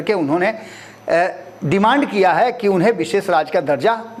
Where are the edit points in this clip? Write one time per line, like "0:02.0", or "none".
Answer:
none